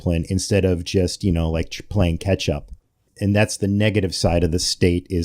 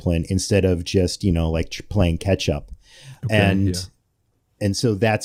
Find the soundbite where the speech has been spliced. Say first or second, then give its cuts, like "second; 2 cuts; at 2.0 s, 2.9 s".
first; 1 cut; at 3.1 s